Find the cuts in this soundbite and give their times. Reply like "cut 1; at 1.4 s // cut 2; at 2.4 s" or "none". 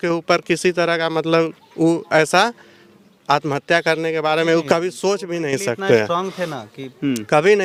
none